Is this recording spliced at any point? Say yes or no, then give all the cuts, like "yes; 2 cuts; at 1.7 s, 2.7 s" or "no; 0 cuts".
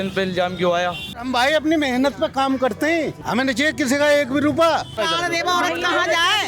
yes; 3 cuts; at 1.2 s, 3.2 s, 5.0 s